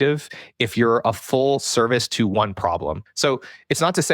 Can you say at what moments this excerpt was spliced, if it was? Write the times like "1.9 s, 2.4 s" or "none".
3.1 s